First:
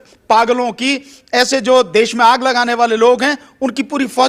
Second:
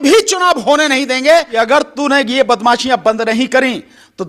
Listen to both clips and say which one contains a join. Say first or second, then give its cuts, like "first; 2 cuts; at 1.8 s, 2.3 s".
second; 1 cut; at 1.5 s